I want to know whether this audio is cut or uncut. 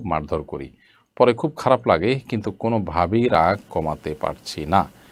uncut